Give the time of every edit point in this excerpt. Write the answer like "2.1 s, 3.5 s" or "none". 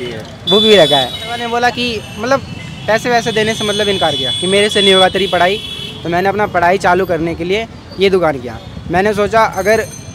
1.4 s